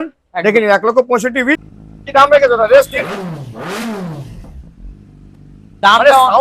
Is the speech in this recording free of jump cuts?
no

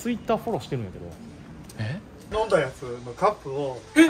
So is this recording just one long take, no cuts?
no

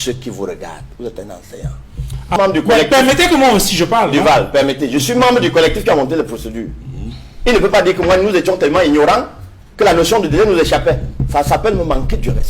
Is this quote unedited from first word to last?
no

